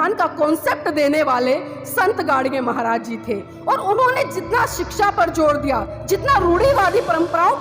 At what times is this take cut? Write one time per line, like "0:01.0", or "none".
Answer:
0:05.9